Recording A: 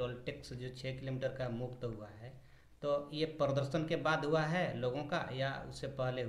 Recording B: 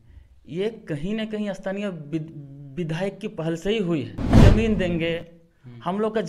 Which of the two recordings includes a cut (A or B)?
B